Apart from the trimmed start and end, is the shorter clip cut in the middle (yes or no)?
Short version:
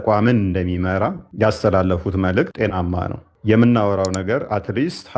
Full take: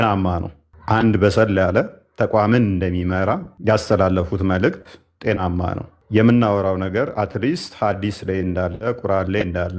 yes